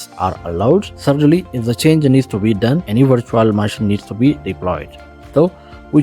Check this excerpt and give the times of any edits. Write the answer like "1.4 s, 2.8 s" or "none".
0.9 s, 2.8 s